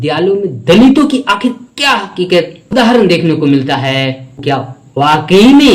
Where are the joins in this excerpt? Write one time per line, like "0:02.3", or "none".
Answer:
0:04.4

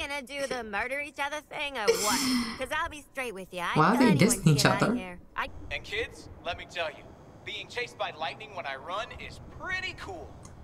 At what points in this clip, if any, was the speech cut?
0:05.5

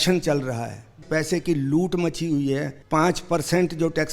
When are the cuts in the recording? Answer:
0:01.0
0:02.7

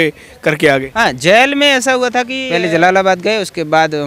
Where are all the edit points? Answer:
0:02.4

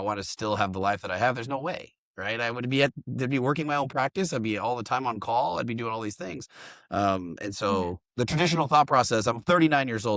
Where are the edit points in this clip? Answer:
none

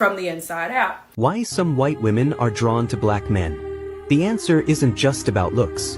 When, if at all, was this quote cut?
0:01.0

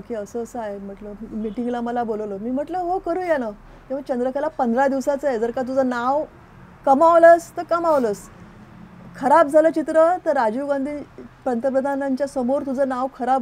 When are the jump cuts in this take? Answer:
none

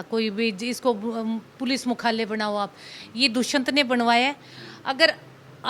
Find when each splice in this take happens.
none

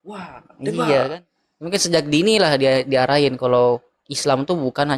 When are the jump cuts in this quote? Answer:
0:01.1

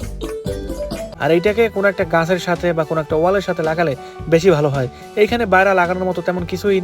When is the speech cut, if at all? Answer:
0:01.0

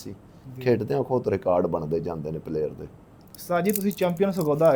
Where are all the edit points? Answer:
none

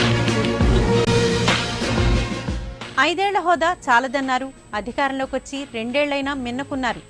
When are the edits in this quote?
none

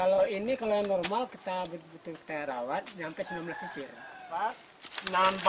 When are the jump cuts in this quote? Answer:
0:04.2

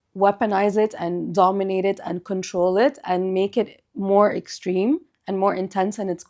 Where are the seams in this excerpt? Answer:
0:01.0

